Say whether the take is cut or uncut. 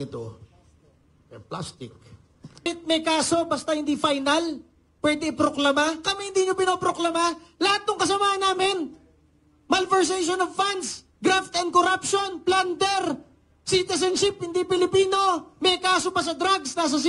cut